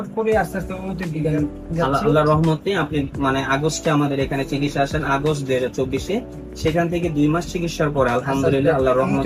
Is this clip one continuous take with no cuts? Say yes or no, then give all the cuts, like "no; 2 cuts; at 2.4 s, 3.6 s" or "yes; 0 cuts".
yes; 0 cuts